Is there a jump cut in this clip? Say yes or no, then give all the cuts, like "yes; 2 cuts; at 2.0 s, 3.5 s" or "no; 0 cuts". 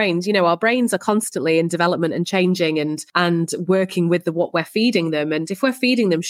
yes; 1 cut; at 3.0 s